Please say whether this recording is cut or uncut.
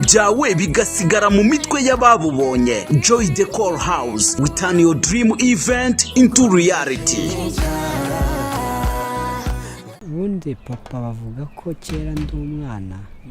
cut